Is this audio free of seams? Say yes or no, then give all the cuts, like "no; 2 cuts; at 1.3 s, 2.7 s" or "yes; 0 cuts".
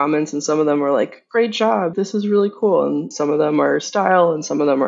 no; 2 cuts; at 1.9 s, 3.1 s